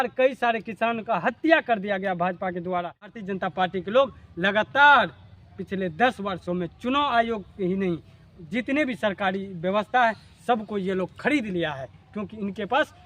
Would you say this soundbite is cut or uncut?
cut